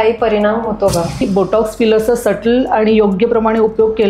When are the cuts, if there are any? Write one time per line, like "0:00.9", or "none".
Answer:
0:01.2